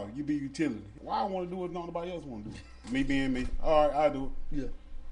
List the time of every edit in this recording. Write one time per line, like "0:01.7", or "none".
0:00.9
0:02.7